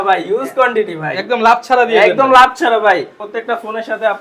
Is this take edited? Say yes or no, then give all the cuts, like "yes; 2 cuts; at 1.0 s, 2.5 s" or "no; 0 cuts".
yes; 1 cut; at 3.2 s